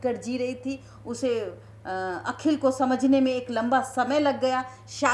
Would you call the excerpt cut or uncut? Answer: uncut